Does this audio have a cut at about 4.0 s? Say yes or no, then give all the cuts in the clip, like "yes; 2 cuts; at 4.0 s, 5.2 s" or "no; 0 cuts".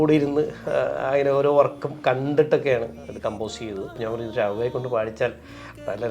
yes; 1 cut; at 4.0 s